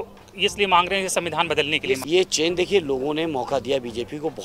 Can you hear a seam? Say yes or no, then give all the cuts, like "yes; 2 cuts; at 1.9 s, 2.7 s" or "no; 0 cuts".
yes; 1 cut; at 2.0 s